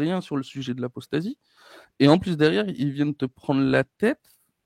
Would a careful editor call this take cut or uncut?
uncut